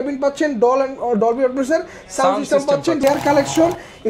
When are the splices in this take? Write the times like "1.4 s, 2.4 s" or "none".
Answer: 3.0 s